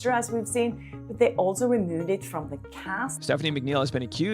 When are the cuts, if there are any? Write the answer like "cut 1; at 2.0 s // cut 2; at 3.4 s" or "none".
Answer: cut 1; at 3.1 s